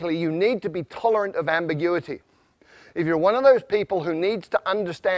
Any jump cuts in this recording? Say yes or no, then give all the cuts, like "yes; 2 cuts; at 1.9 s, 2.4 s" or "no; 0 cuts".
no; 0 cuts